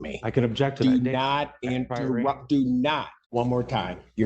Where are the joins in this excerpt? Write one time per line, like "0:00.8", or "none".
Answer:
0:03.2